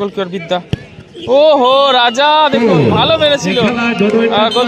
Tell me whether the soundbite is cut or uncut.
uncut